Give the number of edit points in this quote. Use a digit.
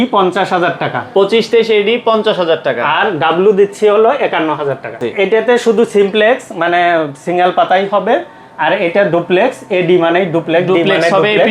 1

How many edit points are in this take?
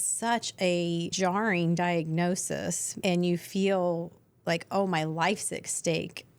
2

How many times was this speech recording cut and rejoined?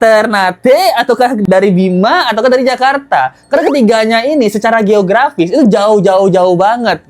0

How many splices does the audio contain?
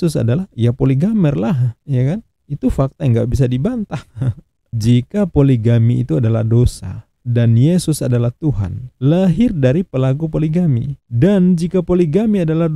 1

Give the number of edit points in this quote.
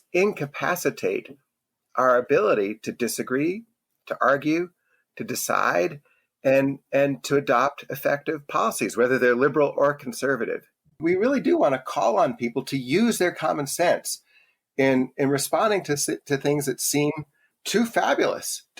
2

